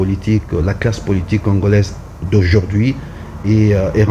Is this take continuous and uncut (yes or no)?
yes